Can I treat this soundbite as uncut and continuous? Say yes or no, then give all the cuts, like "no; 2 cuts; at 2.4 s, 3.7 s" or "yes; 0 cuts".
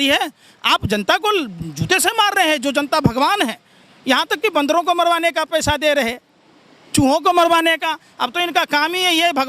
yes; 0 cuts